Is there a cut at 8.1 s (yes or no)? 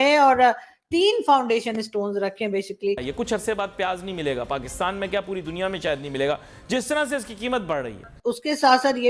yes